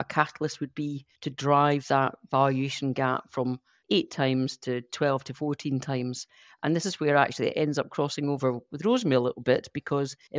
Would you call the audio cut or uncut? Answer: cut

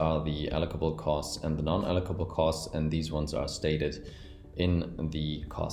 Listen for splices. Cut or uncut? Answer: uncut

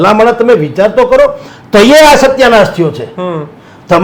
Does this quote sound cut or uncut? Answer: uncut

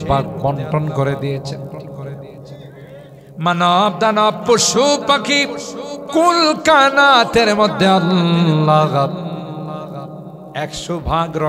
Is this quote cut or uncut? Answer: uncut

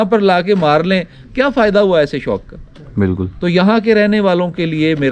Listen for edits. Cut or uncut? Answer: uncut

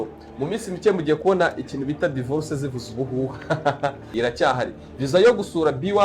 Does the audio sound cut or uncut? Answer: cut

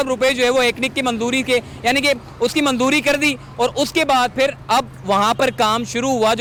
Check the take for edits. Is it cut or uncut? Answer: uncut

